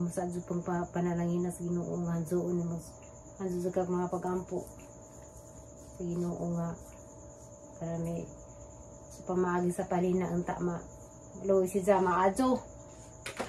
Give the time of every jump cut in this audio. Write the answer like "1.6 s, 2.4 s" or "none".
none